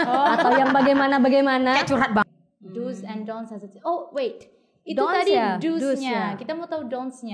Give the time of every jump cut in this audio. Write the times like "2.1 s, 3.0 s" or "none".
2.2 s